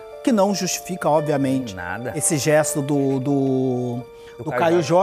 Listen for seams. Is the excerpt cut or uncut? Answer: uncut